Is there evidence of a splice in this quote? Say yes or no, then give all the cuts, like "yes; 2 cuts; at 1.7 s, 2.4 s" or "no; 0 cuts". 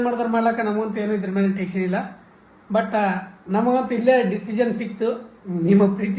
no; 0 cuts